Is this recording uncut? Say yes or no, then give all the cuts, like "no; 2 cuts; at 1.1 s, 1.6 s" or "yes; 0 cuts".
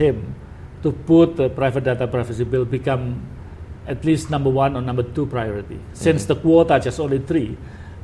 yes; 0 cuts